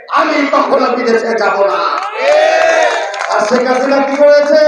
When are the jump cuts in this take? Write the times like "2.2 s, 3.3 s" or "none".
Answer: none

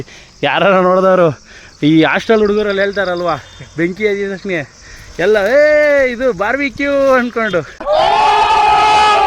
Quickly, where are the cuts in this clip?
7.8 s

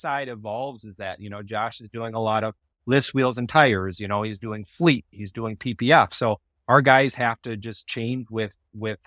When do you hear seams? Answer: none

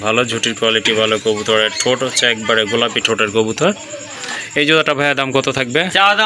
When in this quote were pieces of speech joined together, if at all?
none

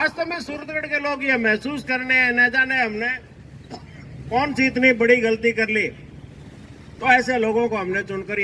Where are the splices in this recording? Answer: none

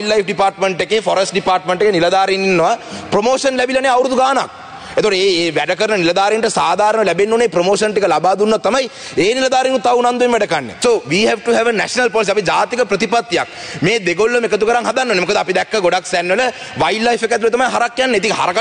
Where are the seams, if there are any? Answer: 10.7 s

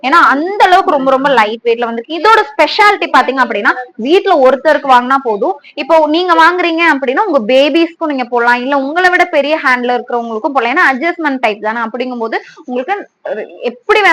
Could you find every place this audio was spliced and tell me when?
none

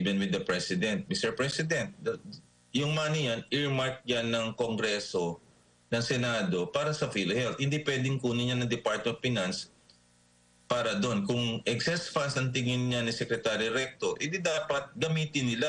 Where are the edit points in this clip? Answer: none

